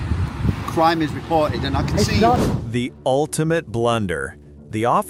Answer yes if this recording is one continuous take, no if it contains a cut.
yes